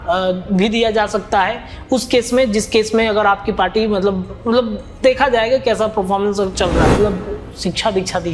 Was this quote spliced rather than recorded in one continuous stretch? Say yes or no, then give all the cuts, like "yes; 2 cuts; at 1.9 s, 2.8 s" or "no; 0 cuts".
yes; 1 cut; at 7.0 s